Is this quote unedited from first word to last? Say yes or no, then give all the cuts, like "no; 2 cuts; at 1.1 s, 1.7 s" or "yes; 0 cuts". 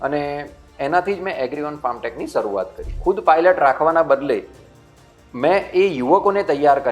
no; 1 cut; at 2.9 s